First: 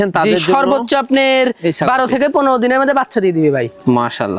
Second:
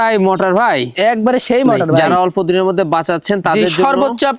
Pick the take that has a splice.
second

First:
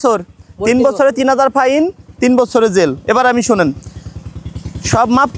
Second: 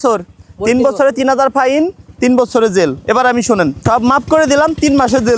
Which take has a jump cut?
second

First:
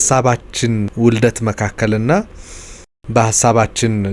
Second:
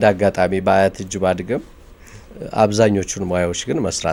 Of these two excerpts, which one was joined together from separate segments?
first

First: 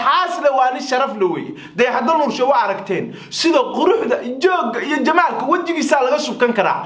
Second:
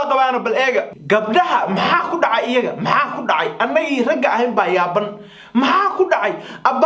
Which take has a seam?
second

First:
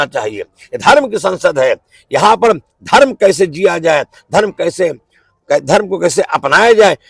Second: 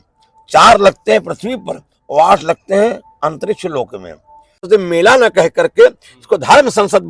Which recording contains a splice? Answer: second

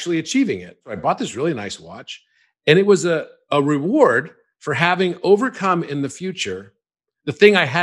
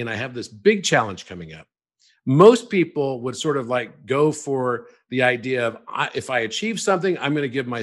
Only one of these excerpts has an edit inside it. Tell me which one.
first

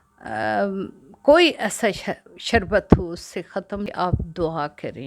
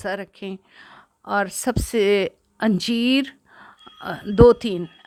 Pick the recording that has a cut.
first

